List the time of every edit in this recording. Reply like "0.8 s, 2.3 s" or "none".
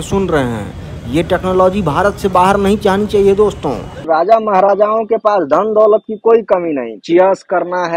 3.9 s, 6.9 s